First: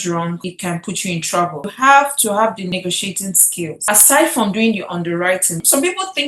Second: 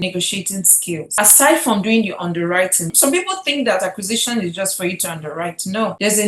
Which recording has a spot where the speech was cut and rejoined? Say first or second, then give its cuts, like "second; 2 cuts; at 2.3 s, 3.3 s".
first; 1 cut; at 1.7 s